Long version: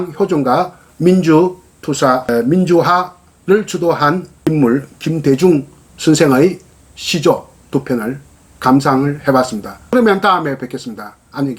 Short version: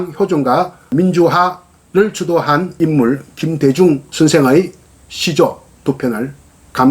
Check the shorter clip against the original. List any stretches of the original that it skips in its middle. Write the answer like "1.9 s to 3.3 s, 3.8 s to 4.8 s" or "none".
0.9 s to 2.4 s, 4.2 s to 4.3 s, 5.7 s to 5.9 s